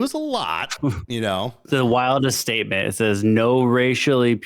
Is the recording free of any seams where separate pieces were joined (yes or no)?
no